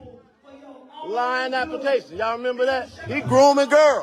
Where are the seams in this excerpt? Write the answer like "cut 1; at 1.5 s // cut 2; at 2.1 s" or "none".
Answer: cut 1; at 3.0 s

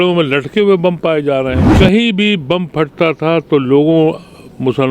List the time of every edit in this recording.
cut 1; at 1.6 s

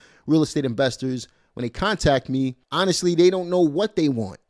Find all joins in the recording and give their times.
none

